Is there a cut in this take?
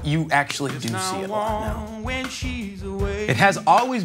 yes; 2 cuts; at 1.0 s, 3.2 s

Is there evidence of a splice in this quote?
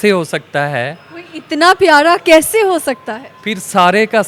no; 0 cuts

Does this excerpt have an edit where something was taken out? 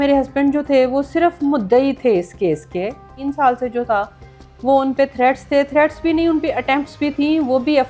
yes; 1 cut; at 3.2 s

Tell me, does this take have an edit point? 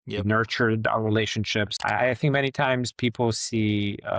yes; 1 cut; at 1.7 s

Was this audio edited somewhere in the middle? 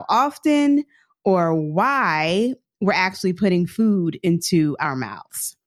no; 0 cuts

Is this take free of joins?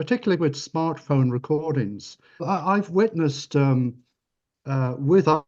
no; 1 cut; at 2.4 s

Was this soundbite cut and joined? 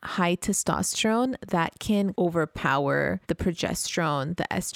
yes; 2 cuts; at 2.1 s, 3.2 s

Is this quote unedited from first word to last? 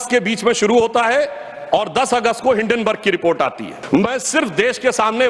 no; 1 cut; at 3.7 s

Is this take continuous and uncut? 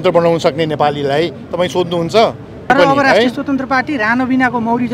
no; 1 cut; at 2.7 s

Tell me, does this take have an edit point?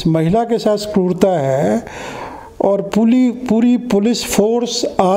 no; 0 cuts

